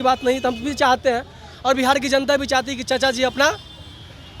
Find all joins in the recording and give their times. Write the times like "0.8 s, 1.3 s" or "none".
none